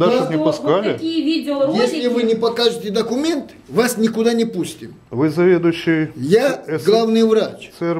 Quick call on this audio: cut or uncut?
uncut